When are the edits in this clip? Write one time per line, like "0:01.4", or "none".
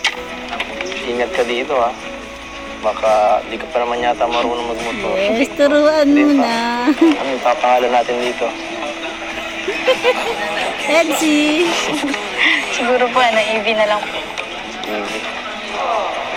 none